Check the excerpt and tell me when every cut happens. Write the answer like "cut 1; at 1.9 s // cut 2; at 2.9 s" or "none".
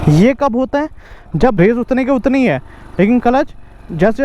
cut 1; at 1.6 s